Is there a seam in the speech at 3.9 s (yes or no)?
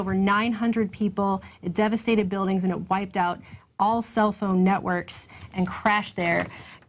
yes